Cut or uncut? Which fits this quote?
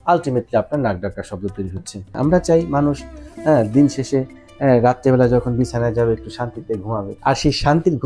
cut